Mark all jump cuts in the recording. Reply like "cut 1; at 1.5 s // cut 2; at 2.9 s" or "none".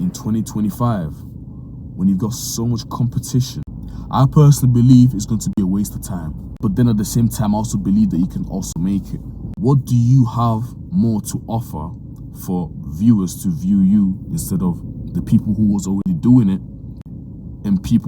cut 1; at 3.7 s // cut 2; at 6.4 s // cut 3; at 9.4 s